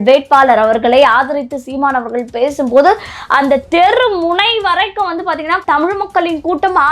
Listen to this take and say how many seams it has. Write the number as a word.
one